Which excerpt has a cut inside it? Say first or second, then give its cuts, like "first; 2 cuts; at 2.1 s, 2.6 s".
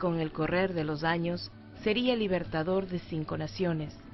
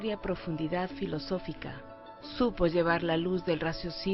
first; 1 cut; at 2.9 s